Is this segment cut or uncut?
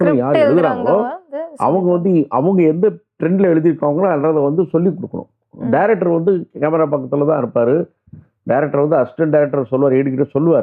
uncut